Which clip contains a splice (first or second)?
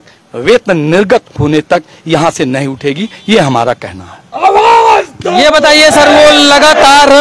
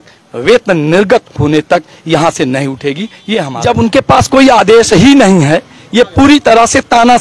second